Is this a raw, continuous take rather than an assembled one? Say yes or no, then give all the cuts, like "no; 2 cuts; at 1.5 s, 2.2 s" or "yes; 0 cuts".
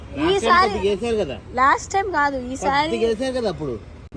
yes; 0 cuts